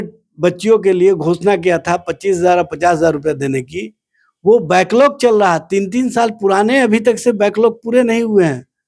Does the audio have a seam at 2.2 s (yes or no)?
no